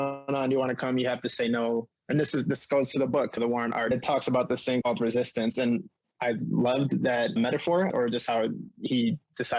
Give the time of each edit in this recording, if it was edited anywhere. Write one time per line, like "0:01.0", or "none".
0:07.9